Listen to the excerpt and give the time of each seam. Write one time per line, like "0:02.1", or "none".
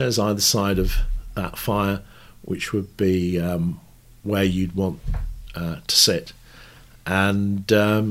none